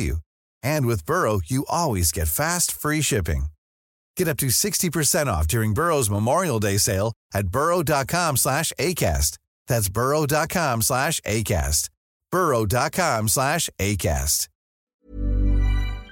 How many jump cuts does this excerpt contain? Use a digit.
1